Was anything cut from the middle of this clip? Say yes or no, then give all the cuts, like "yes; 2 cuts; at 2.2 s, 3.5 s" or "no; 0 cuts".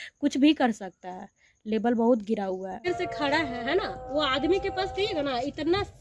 yes; 1 cut; at 2.9 s